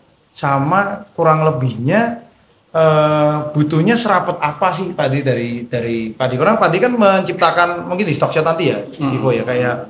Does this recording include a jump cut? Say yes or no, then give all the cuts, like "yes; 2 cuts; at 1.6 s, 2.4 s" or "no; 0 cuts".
no; 0 cuts